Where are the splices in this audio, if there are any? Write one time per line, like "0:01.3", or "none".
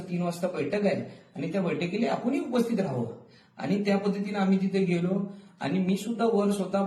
none